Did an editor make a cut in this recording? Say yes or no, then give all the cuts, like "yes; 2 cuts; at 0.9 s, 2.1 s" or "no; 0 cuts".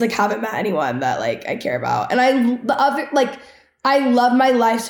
no; 0 cuts